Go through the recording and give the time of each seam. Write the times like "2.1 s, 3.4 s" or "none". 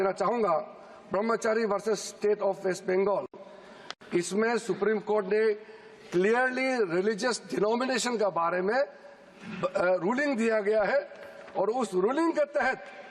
none